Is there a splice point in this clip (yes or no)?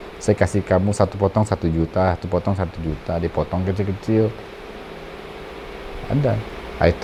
no